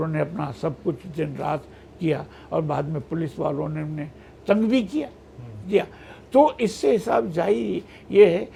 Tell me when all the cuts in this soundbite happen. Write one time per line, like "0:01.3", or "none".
none